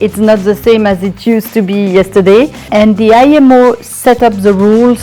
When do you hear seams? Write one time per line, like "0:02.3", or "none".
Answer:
0:02.7